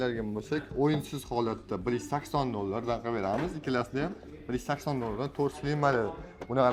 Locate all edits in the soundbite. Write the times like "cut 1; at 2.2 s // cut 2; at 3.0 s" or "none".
none